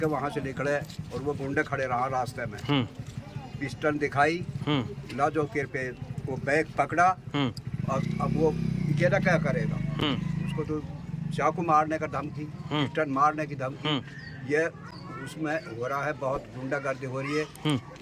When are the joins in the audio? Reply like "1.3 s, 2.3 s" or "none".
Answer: none